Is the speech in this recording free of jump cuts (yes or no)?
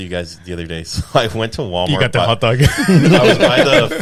yes